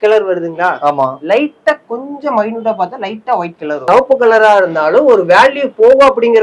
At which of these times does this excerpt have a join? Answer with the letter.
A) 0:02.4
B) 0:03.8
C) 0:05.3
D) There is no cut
B